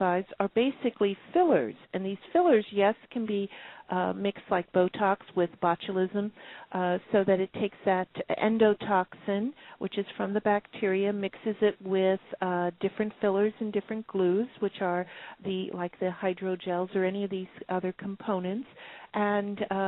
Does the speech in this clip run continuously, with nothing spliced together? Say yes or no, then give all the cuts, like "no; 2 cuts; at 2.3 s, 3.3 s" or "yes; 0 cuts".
no; 1 cut; at 9.2 s